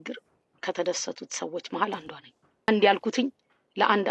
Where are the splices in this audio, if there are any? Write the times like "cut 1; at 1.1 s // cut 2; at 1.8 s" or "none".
cut 1; at 2.7 s